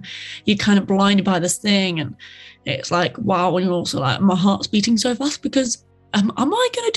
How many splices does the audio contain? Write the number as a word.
zero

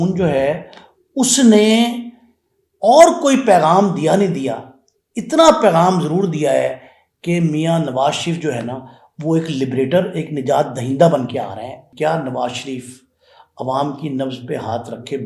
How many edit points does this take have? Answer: one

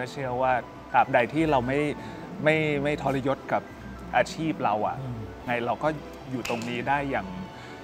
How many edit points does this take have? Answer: one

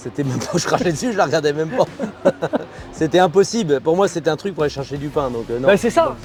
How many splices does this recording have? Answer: zero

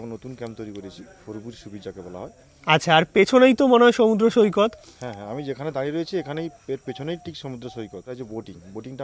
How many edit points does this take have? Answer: one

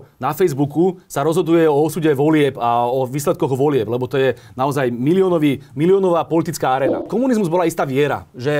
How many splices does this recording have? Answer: one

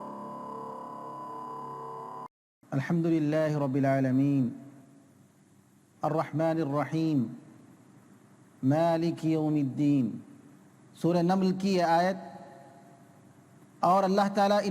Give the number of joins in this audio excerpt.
one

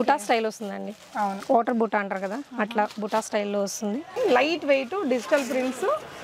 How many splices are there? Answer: one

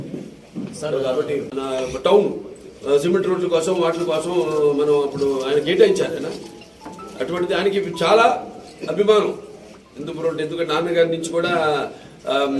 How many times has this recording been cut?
one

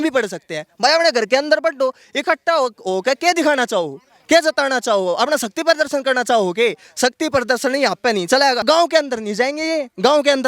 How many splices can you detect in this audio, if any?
one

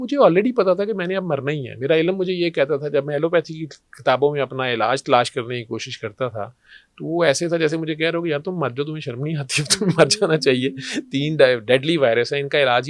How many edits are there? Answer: zero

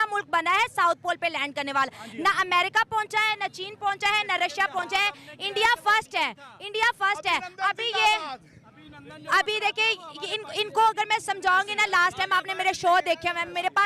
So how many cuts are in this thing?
zero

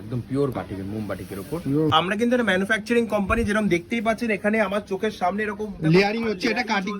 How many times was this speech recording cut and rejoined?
one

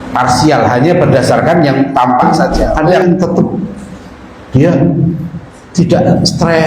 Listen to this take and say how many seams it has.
one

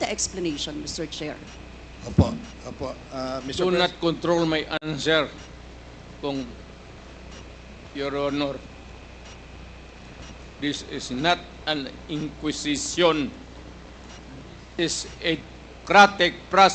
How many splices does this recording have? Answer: zero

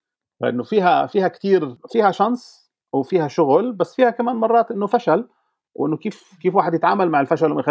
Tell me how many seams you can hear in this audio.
one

